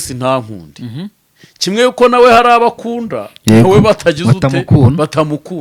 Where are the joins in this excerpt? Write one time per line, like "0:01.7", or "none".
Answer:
none